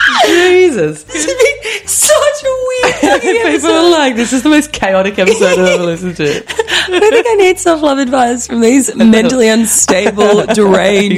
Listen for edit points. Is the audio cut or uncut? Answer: cut